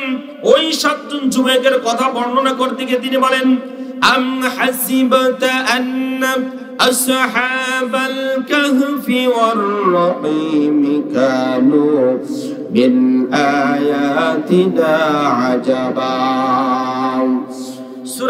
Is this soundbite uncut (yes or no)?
yes